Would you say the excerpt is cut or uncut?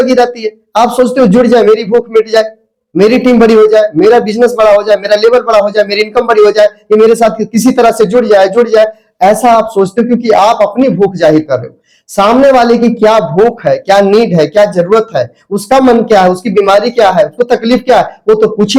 uncut